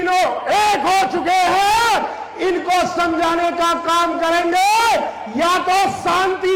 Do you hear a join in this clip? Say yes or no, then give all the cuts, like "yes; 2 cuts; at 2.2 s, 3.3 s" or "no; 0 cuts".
no; 0 cuts